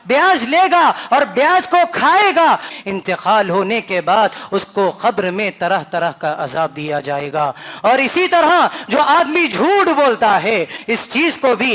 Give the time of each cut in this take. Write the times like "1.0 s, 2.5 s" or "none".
2.7 s, 10.8 s